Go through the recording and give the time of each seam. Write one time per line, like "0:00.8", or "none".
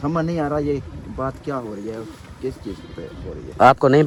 none